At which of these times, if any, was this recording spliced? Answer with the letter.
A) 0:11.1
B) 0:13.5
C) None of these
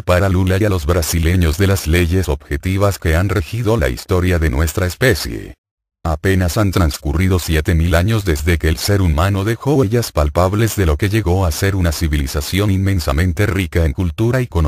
B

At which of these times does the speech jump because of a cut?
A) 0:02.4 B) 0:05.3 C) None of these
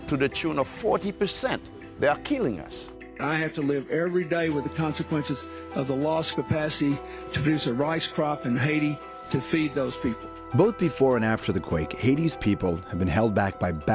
A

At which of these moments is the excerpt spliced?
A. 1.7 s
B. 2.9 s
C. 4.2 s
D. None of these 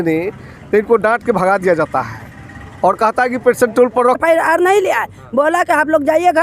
C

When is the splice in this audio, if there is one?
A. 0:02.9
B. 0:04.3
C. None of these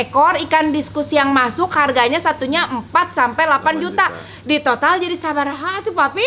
C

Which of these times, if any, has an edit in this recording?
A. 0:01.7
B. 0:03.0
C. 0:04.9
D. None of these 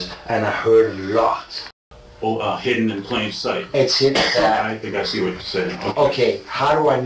A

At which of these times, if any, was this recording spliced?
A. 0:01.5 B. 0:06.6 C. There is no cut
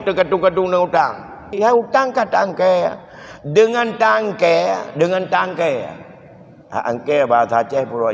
A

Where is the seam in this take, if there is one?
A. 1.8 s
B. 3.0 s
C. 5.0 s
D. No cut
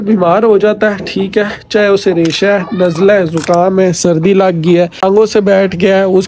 C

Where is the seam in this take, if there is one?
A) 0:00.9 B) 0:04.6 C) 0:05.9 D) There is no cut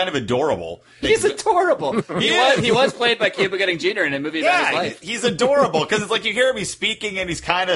A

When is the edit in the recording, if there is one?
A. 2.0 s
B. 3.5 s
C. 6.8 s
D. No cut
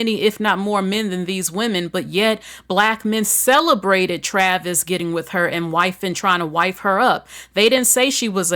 D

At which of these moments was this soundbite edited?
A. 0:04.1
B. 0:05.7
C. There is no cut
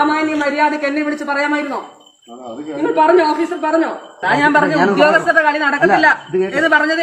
A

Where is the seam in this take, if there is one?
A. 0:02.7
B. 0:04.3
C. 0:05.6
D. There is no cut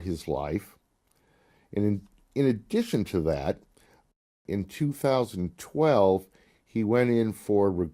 B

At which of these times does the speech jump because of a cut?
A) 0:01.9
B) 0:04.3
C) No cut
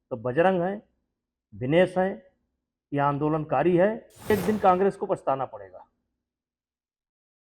B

